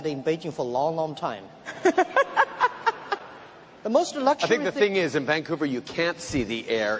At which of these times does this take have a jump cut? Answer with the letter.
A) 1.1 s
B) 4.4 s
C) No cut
A